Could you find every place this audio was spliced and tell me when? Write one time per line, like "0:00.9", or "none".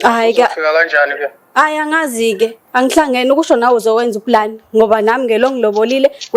none